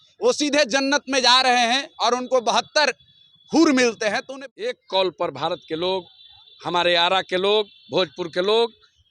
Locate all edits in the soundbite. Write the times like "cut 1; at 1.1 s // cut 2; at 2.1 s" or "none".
cut 1; at 4.3 s